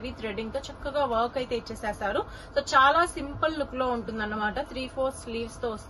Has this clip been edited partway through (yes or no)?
no